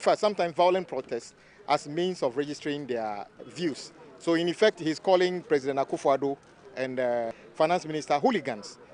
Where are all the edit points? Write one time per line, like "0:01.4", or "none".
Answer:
0:03.4
0:07.4